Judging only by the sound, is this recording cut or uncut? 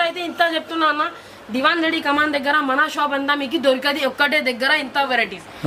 uncut